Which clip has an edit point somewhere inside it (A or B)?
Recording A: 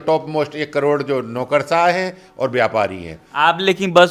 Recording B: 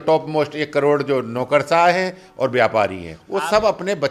B